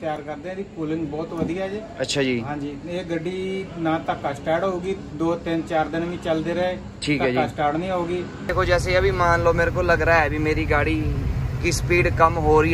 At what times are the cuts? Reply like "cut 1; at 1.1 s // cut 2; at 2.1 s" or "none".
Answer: cut 1; at 8.5 s